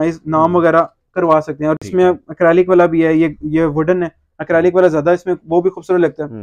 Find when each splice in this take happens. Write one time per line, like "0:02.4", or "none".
none